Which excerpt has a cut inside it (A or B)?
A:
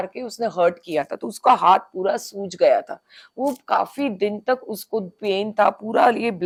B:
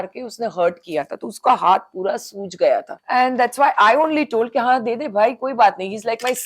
B